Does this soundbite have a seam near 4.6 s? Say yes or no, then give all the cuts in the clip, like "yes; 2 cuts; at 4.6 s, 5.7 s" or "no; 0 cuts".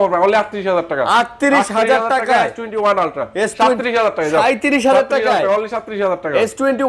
no; 0 cuts